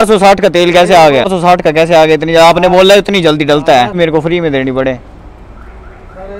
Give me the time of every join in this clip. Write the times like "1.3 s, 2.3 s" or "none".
1.3 s, 4.0 s